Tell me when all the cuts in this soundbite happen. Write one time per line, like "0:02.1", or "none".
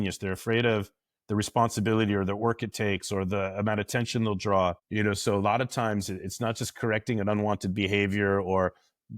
0:04.8